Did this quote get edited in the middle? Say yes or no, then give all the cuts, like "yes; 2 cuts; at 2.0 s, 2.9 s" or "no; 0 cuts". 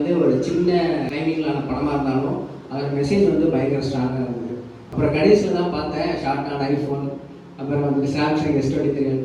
yes; 2 cuts; at 1.1 s, 4.8 s